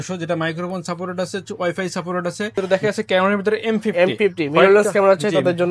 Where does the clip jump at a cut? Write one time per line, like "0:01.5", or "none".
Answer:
0:02.7

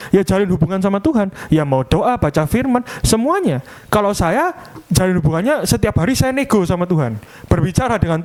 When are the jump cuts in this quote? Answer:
none

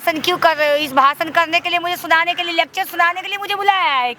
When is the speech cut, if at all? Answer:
none

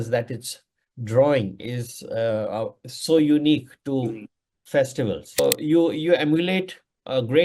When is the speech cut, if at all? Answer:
0:05.4

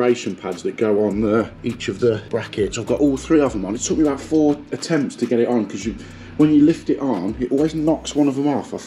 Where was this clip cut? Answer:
0:01.5
0:02.3

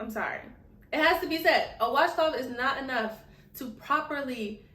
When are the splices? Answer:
none

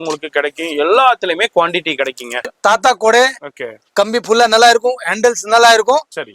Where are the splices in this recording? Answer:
0:02.5

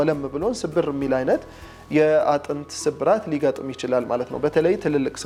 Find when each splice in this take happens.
none

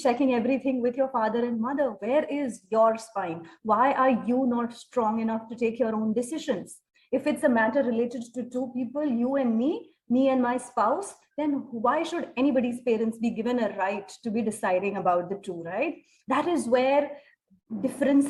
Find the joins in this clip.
none

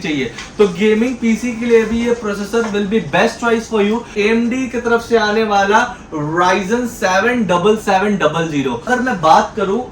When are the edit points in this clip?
0:04.1
0:08.8

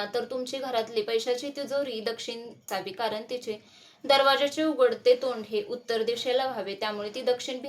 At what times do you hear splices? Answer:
0:02.7

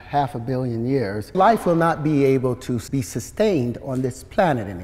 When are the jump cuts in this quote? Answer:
0:01.3
0:02.8

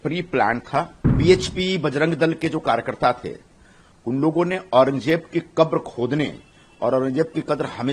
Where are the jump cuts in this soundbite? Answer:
0:01.0

